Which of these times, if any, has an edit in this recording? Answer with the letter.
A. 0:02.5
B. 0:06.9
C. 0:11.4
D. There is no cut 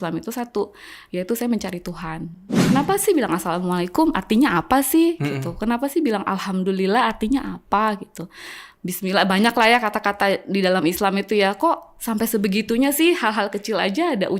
A